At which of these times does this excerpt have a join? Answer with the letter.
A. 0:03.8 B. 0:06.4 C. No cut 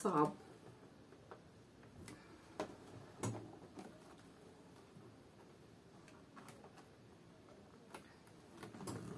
C